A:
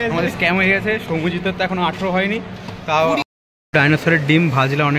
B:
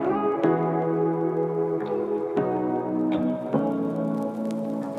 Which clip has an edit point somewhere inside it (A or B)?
A